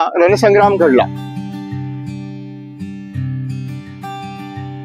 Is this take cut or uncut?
uncut